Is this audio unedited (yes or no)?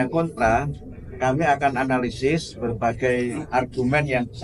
yes